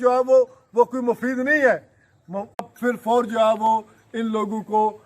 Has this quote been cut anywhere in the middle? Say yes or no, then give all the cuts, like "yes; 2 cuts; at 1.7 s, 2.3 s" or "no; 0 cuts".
yes; 1 cut; at 2.7 s